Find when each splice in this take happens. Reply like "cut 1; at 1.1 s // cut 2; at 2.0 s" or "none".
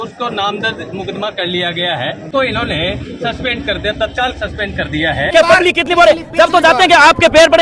cut 1; at 2.3 s // cut 2; at 5.3 s